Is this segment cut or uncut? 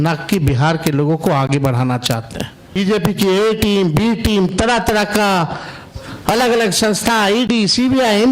cut